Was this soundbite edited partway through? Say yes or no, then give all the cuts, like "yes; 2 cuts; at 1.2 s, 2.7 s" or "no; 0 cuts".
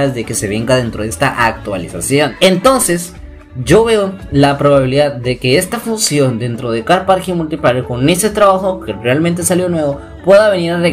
yes; 1 cut; at 2.3 s